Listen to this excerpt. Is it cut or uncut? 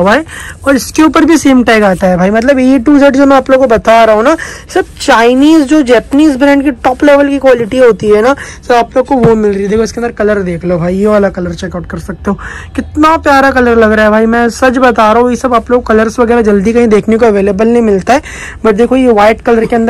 uncut